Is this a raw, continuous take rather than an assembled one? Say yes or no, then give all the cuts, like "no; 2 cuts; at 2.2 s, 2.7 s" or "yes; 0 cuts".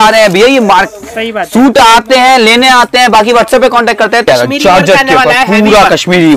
no; 1 cut; at 4.3 s